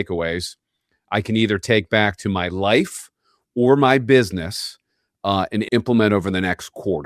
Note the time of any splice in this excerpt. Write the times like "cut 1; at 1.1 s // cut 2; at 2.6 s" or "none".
cut 1; at 5.7 s